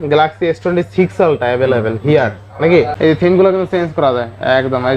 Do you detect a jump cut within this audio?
yes; 1 cut; at 2.9 s

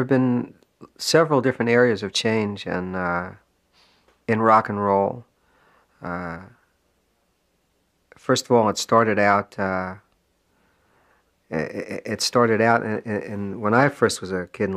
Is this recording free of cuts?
yes; 0 cuts

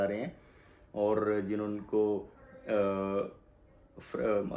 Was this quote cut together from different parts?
no; 0 cuts

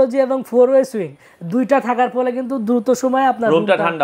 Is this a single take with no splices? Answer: yes; 0 cuts

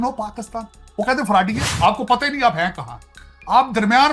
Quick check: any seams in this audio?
yes; 1 cut; at 1.7 s

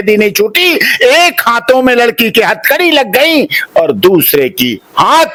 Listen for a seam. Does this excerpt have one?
no; 0 cuts

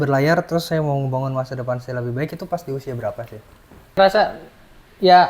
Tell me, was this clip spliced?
yes; 1 cut; at 4.0 s

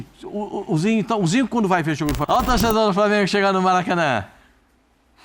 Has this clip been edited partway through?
yes; 1 cut; at 2.2 s

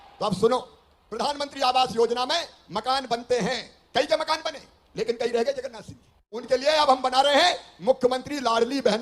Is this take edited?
yes; 1 cut; at 6.2 s

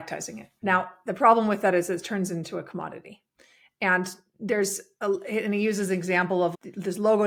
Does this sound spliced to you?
no; 0 cuts

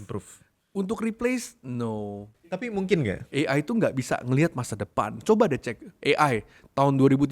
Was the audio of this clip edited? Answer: yes; 2 cuts; at 2.6 s, 3.2 s

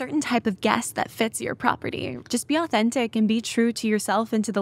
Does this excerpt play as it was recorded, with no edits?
no; 1 cut; at 2.1 s

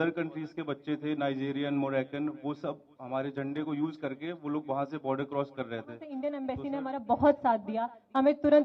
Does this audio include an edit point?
yes; 1 cut; at 6.1 s

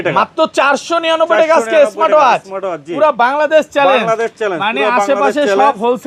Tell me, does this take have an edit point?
no; 0 cuts

